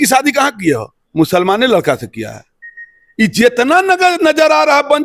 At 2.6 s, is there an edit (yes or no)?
no